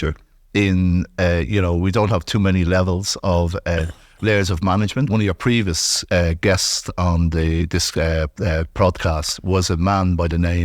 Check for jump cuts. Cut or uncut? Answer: cut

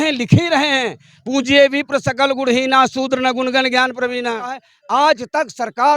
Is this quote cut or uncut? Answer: cut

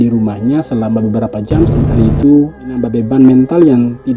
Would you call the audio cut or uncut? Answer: cut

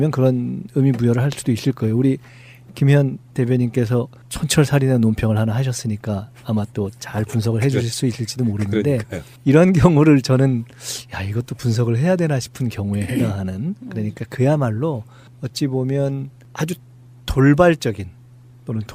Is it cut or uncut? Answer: uncut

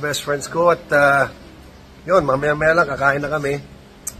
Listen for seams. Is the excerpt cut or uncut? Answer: uncut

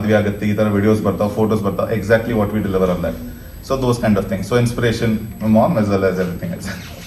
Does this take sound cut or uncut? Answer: uncut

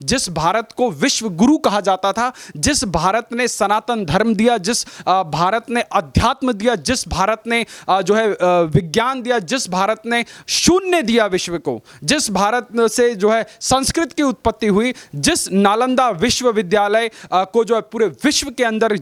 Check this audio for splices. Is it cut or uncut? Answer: uncut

